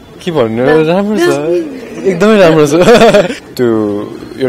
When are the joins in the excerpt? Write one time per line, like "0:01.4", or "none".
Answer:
0:03.4